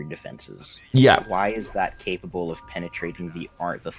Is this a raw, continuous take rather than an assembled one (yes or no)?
yes